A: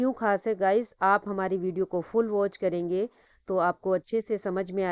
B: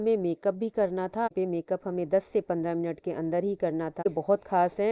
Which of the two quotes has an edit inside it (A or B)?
B